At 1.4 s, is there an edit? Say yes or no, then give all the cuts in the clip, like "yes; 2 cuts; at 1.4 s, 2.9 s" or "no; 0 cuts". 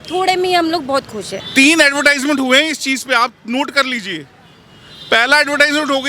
yes; 1 cut; at 1.4 s